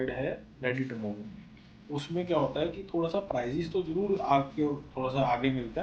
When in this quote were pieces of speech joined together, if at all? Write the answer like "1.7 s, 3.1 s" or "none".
1.4 s